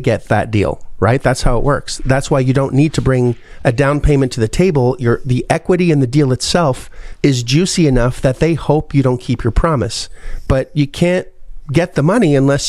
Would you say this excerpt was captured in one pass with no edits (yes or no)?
yes